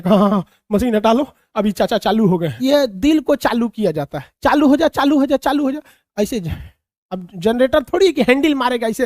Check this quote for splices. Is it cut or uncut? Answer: cut